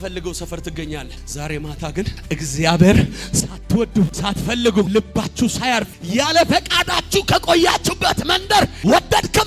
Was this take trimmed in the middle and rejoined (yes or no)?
yes